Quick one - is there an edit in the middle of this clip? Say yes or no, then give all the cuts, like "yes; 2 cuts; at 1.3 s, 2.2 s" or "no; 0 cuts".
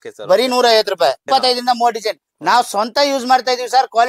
yes; 1 cut; at 1.2 s